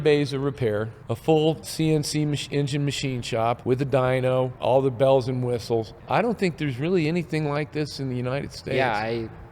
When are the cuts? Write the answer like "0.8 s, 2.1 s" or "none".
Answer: 1.0 s, 1.7 s, 3.6 s, 4.5 s, 6.0 s